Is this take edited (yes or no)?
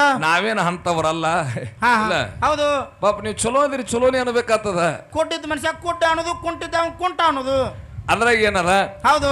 yes